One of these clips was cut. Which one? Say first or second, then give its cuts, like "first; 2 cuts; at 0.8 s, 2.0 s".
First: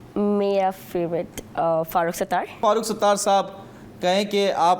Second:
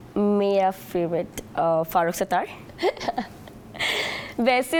first; 1 cut; at 2.6 s